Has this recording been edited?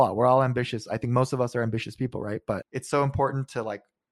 yes; 1 cut; at 2.7 s

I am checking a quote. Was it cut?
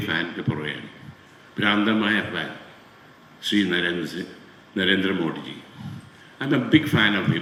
no; 0 cuts

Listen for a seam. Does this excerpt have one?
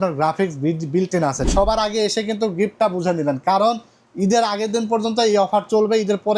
yes; 1 cut; at 1.5 s

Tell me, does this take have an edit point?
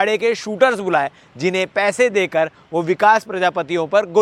no; 0 cuts

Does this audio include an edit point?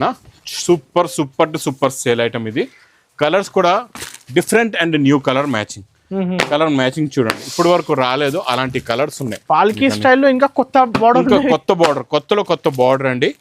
no; 0 cuts

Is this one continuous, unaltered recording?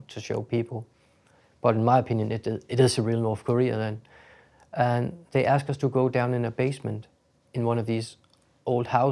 yes; 0 cuts

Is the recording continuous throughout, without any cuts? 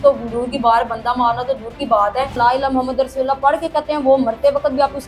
no; 1 cut; at 2.4 s

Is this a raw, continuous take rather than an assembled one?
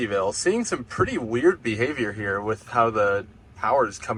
yes; 0 cuts

